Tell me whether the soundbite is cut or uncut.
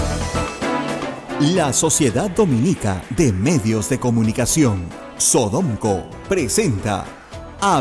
cut